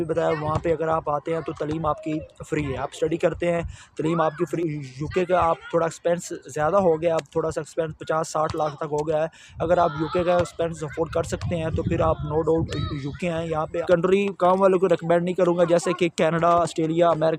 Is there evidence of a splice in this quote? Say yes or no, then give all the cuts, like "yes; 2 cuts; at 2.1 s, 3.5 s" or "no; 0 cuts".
yes; 2 cuts; at 4.5 s, 13.8 s